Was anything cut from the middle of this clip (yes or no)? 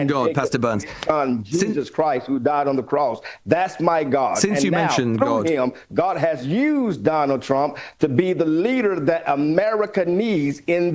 no